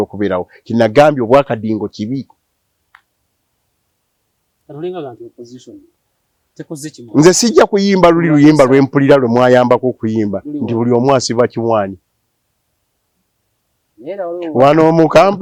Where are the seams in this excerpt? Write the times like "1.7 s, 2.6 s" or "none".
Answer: none